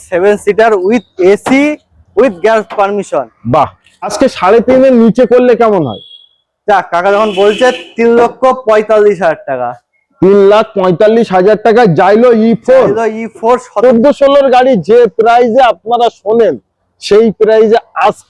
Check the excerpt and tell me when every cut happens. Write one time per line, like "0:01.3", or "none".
0:04.1
0:13.7